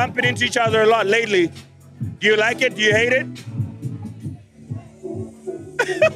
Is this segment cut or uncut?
uncut